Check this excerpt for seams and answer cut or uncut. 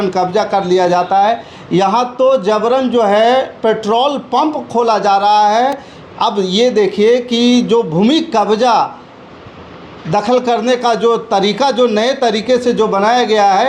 uncut